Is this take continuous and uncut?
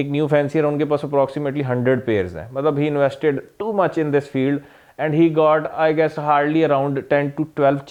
yes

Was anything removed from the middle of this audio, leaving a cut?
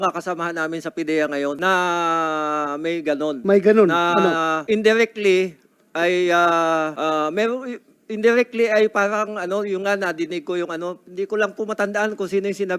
yes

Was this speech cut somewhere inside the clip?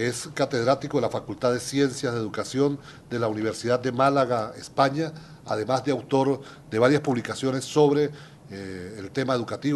yes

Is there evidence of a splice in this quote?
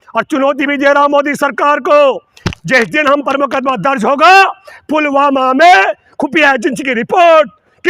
no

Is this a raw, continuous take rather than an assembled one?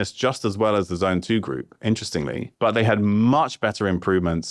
no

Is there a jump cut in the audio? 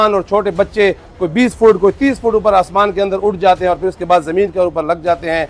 no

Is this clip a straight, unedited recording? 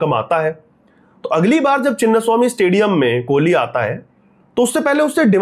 yes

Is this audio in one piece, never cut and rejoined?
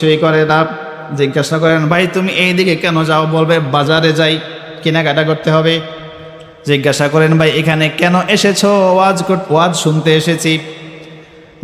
yes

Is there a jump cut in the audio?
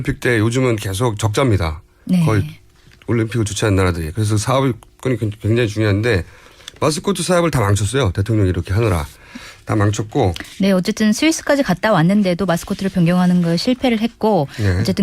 yes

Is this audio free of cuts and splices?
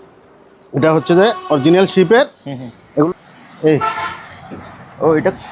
no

